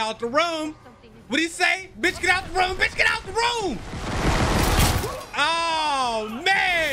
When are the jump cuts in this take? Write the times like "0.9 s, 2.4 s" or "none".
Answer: none